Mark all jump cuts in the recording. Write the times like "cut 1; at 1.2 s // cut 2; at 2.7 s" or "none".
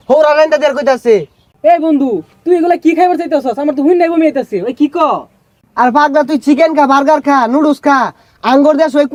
none